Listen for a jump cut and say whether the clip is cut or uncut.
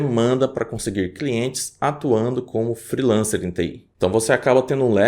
cut